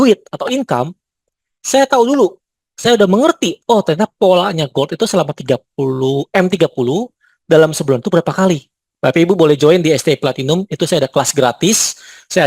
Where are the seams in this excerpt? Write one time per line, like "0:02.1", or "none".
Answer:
0:08.8